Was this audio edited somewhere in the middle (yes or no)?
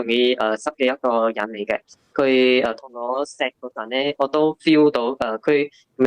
no